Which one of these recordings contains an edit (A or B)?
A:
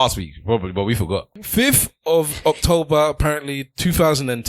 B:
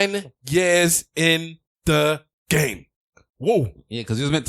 A